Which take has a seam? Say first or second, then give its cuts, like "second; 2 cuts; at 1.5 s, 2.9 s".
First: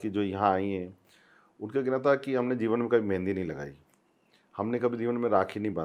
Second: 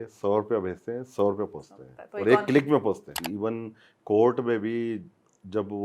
second; 1 cut; at 3.2 s